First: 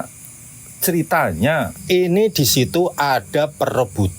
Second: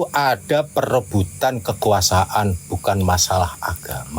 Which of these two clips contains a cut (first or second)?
first